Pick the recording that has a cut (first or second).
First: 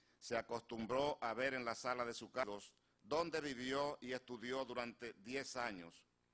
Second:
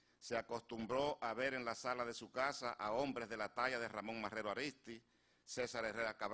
second